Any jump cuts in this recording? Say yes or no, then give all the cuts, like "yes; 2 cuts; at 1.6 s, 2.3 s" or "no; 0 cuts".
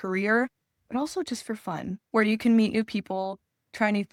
no; 0 cuts